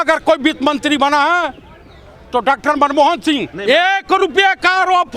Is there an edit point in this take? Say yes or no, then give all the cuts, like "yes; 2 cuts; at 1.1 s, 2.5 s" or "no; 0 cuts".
no; 0 cuts